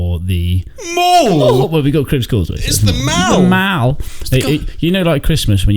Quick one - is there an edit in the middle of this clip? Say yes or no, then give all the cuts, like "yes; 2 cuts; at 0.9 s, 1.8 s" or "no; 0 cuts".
no; 0 cuts